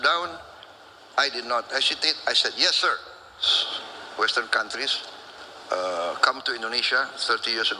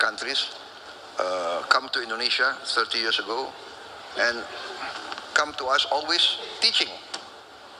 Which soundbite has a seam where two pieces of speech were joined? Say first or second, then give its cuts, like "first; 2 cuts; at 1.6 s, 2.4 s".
first; 1 cut; at 3.5 s